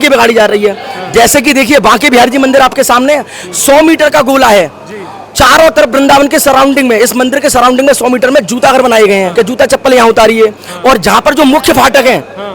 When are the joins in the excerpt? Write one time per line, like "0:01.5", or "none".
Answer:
0:09.3